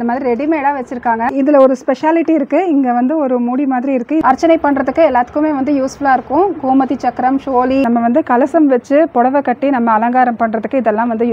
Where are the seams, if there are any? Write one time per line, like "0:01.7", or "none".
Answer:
0:01.3
0:04.2
0:07.9